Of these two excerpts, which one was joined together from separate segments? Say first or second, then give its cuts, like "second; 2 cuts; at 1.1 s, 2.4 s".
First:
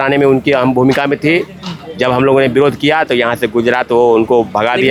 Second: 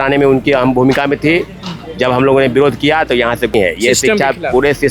second; 1 cut; at 3.5 s